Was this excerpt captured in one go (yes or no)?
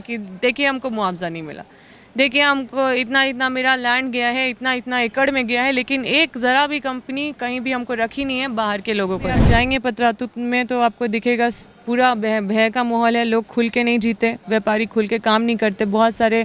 no